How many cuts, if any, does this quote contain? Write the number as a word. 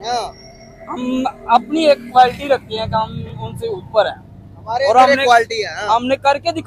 zero